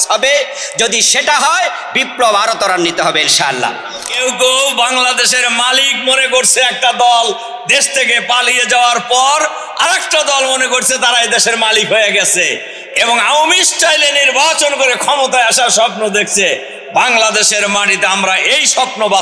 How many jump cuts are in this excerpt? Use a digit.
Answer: 1